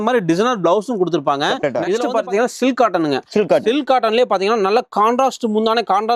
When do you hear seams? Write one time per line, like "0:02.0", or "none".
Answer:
0:02.0